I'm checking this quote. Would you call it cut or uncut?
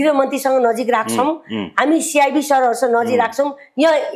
uncut